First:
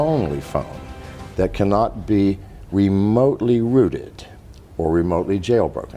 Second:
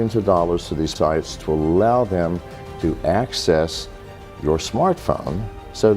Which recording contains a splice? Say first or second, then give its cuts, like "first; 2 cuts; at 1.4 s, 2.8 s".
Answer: second; 1 cut; at 1.0 s